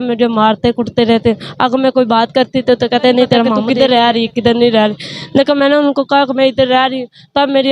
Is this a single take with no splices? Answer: no; 1 cut; at 3.6 s

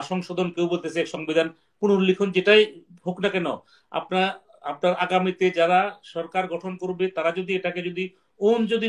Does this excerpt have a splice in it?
no; 0 cuts

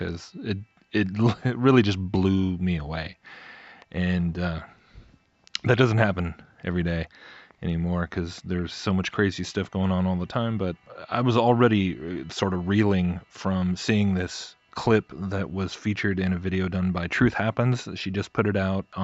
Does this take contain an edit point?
yes; 1 cut; at 15.2 s

